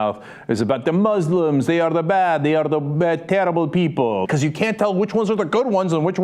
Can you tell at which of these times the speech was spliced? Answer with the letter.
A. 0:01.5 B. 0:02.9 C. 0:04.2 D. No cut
C